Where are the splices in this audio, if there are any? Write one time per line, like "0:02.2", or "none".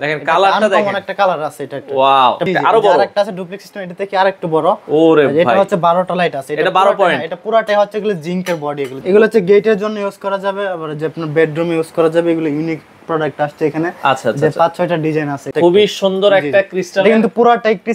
0:02.5
0:09.0
0:15.5

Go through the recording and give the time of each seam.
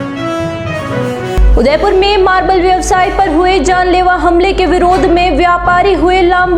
0:01.3

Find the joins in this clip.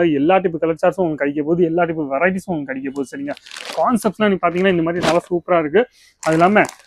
none

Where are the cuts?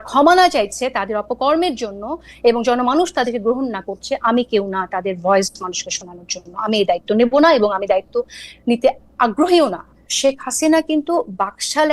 0:10.1

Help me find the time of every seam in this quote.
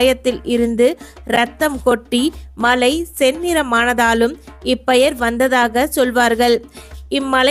none

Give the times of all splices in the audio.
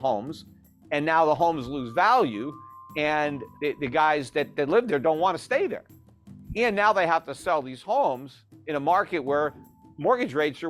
0:03.4

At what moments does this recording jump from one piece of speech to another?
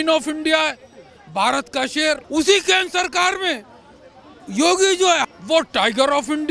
0:02.2
0:05.2

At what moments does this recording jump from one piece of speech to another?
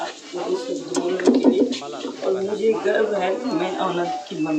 none

